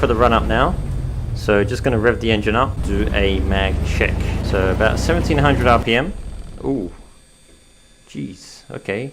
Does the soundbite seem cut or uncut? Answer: cut